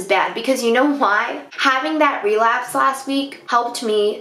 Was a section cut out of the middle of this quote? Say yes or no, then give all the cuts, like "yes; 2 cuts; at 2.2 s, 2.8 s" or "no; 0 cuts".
no; 0 cuts